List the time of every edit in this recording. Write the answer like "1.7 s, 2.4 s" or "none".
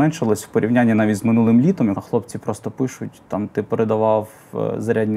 2.0 s